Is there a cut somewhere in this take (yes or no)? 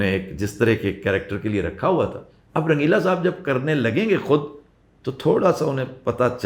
no